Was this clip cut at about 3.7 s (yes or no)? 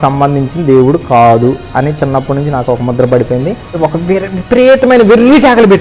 yes